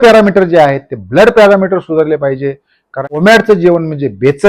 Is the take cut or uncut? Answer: cut